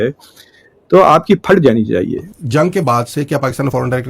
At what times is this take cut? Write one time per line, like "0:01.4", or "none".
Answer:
0:02.5